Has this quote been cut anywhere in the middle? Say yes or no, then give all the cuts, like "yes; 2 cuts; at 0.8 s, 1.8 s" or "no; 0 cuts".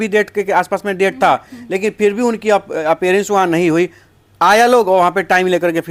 no; 0 cuts